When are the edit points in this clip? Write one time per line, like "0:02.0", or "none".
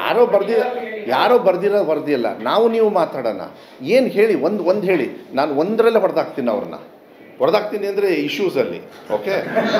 none